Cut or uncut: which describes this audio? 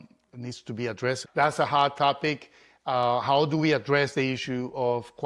cut